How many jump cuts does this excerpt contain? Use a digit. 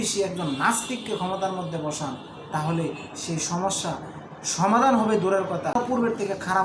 1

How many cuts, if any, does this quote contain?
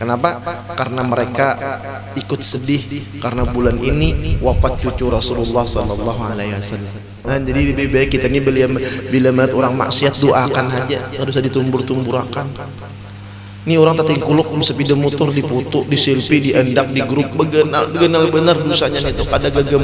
1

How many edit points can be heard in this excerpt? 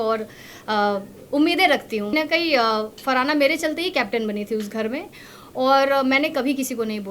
1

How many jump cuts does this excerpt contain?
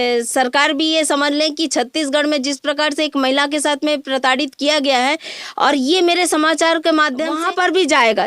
1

